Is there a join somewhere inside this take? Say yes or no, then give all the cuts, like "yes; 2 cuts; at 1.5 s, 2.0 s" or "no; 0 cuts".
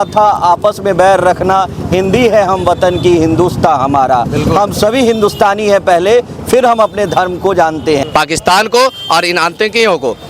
yes; 1 cut; at 8.0 s